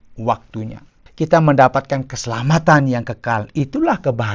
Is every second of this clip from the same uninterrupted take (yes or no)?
no